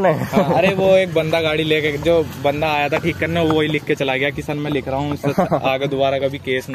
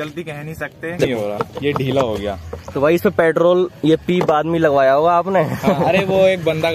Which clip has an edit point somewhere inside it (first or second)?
second